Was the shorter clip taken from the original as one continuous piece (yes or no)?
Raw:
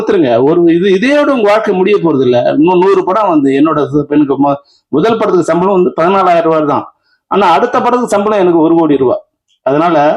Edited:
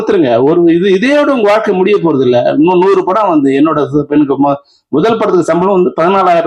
yes